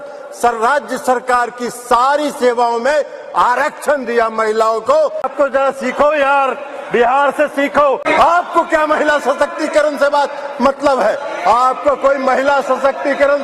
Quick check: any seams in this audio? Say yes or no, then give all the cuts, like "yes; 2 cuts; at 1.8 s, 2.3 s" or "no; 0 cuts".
yes; 2 cuts; at 5.2 s, 8.0 s